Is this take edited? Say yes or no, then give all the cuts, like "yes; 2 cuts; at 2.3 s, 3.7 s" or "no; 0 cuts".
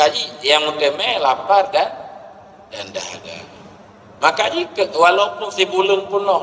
no; 0 cuts